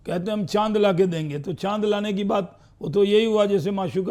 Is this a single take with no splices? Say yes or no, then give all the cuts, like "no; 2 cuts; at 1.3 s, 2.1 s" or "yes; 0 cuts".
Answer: yes; 0 cuts